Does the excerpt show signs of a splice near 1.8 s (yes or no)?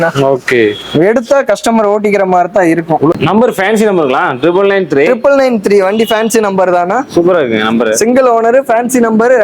no